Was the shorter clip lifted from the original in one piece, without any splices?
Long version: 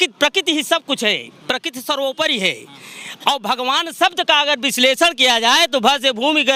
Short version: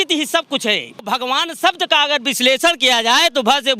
no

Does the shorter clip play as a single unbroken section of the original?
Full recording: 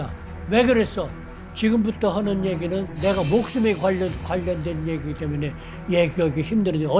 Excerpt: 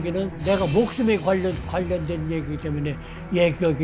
yes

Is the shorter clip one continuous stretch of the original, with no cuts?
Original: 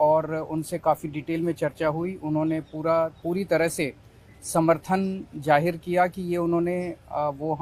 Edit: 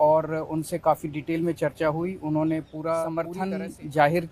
no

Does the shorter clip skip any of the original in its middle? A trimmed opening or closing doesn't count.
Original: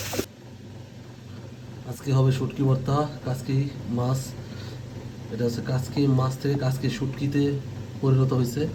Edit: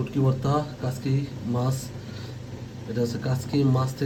no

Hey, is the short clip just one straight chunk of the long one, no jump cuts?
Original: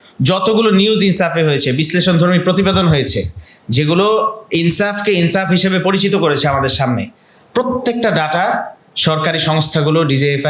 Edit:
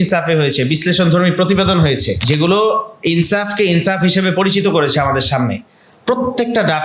no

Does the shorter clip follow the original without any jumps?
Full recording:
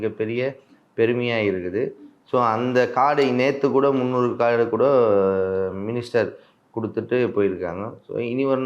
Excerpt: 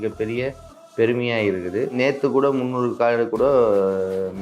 no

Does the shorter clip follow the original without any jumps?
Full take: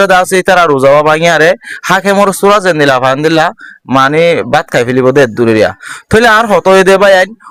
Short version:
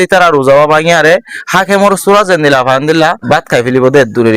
no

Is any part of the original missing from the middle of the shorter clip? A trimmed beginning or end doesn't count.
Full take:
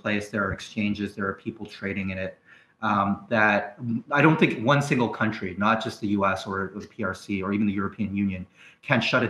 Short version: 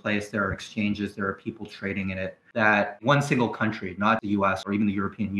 yes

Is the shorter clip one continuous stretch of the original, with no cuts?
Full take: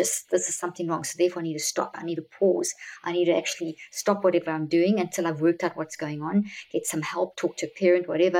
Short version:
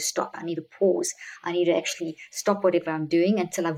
yes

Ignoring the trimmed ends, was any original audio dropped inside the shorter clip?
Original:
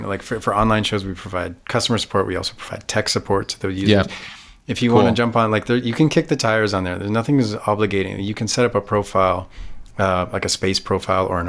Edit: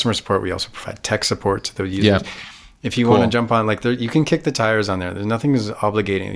no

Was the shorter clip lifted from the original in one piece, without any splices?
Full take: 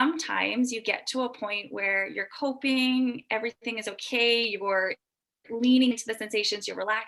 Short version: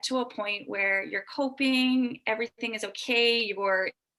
yes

